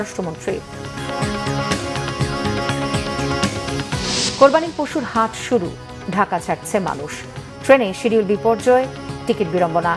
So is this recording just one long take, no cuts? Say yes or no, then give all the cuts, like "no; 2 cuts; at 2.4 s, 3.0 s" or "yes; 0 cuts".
yes; 0 cuts